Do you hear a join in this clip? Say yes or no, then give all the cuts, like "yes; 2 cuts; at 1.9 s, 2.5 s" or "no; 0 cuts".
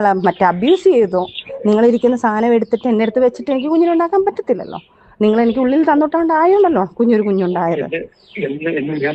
no; 0 cuts